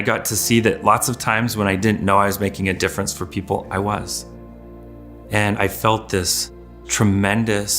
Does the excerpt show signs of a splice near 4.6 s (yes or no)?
no